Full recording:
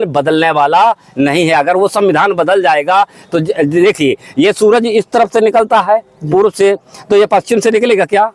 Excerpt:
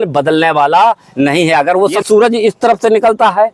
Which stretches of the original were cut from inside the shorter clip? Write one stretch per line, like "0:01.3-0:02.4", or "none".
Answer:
0:02.0-0:04.5